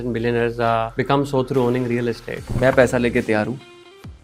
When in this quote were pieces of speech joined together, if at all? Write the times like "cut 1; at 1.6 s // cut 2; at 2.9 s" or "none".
cut 1; at 0.9 s // cut 2; at 2.5 s